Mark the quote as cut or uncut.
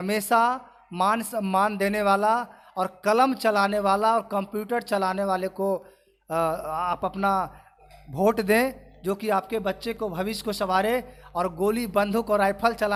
uncut